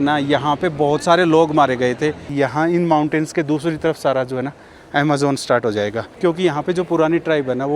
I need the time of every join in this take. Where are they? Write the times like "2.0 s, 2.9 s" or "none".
2.3 s, 6.1 s